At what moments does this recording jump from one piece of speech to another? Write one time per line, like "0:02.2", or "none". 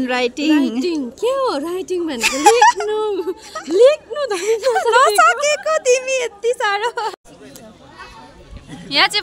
0:07.1